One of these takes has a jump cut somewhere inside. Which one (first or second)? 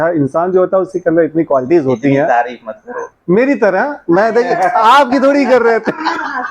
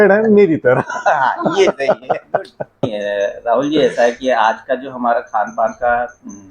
second